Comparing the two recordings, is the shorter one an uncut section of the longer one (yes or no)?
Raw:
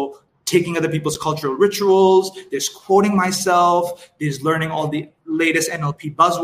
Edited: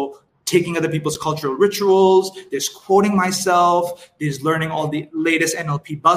no